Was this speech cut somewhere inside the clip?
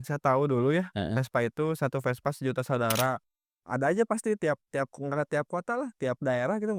yes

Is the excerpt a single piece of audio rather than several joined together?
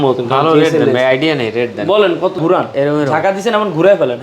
no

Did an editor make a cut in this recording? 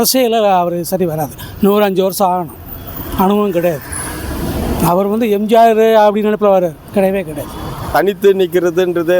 yes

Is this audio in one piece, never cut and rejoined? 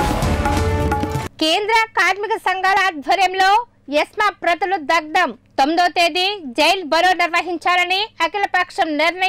no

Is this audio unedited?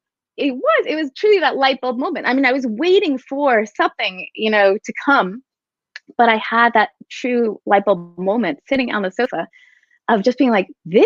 yes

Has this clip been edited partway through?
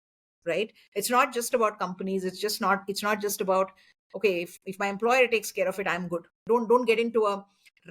yes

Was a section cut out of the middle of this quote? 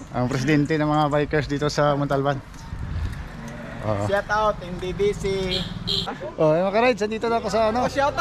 yes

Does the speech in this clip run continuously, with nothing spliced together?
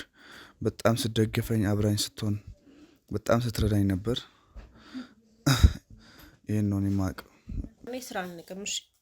no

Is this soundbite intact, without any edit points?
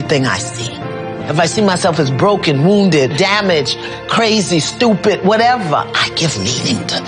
yes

